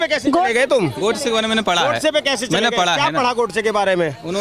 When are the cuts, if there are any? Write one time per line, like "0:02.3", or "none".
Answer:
none